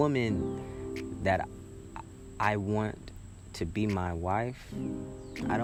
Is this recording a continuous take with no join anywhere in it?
yes; 0 cuts

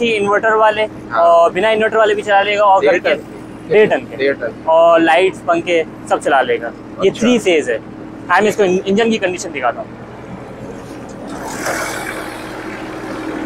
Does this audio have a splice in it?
no; 0 cuts

